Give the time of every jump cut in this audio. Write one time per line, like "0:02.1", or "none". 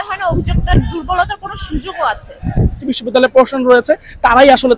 0:02.9